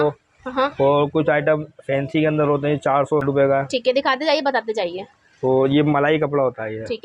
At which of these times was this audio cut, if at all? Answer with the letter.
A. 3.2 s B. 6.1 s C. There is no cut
A